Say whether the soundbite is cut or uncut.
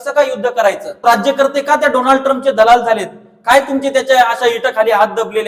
cut